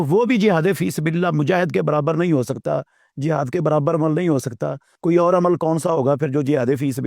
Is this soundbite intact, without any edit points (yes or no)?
yes